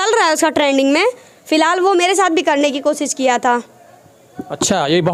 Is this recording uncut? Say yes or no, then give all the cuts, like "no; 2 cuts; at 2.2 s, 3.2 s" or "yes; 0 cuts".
yes; 0 cuts